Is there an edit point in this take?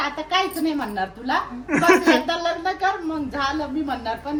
no; 0 cuts

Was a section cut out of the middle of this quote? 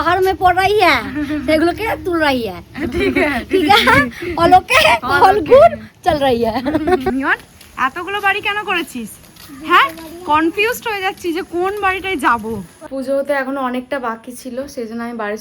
yes; 2 cuts; at 7.1 s, 12.8 s

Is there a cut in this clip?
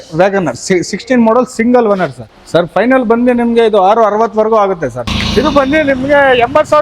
yes; 2 cuts; at 2.3 s, 5.0 s

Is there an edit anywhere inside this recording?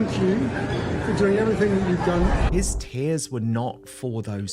yes; 1 cut; at 2.4 s

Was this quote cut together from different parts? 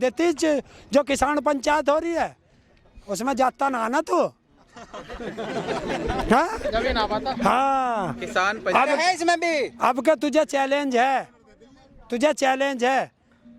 no; 0 cuts

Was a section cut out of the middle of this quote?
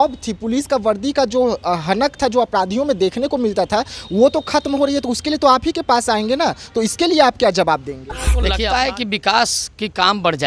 yes; 1 cut; at 8.5 s

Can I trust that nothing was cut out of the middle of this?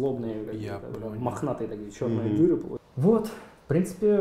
no; 1 cut; at 2.8 s

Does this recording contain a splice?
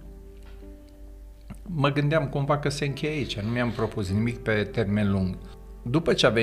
yes; 1 cut; at 5.4 s

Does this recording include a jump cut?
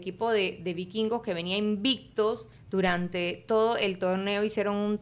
yes; 1 cut; at 2.5 s

